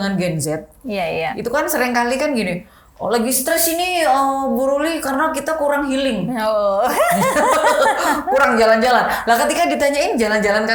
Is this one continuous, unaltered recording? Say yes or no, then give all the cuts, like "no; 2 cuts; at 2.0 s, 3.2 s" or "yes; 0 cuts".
yes; 0 cuts